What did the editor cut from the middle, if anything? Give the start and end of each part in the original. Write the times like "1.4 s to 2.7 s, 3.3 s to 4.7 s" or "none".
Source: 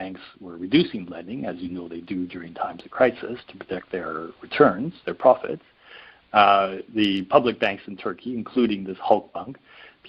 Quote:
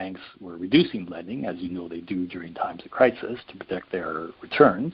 none